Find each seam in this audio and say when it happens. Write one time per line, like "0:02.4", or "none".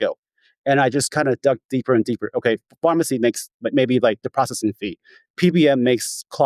none